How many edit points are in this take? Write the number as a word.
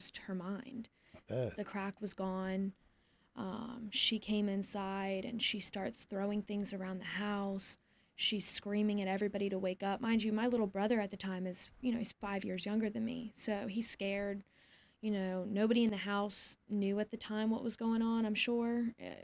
zero